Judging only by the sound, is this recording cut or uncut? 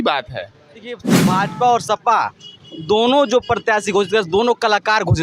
cut